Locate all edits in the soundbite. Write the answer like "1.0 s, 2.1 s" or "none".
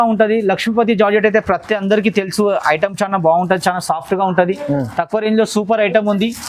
none